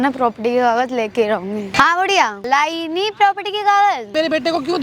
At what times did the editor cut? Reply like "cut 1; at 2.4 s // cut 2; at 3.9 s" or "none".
cut 1; at 1.7 s // cut 2; at 2.4 s // cut 3; at 4.1 s